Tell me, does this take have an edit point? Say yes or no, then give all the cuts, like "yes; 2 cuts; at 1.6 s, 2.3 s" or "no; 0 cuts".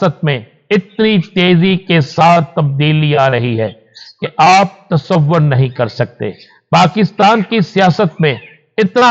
no; 0 cuts